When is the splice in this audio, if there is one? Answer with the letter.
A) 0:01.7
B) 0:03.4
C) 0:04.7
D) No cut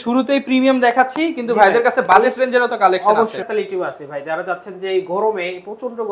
B